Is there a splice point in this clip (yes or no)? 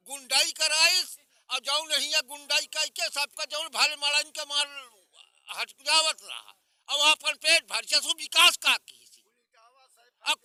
no